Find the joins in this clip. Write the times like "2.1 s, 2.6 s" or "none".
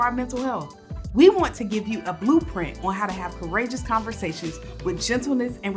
none

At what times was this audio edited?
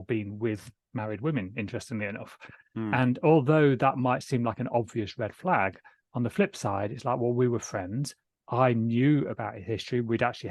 none

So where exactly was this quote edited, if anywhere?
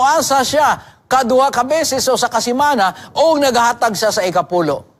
none

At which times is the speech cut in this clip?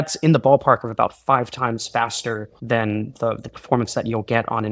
2.5 s

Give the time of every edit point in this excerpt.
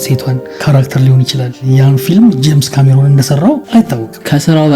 1.6 s, 3.9 s

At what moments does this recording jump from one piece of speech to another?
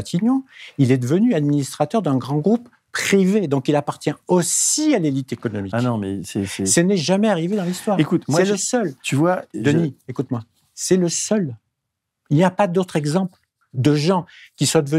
none

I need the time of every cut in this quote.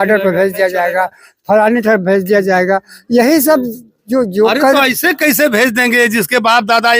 none

